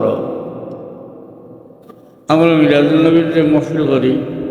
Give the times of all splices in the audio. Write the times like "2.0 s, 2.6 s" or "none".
1.7 s